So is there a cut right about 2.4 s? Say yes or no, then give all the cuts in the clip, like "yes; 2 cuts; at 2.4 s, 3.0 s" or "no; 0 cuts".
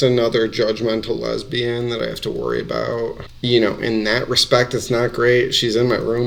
no; 0 cuts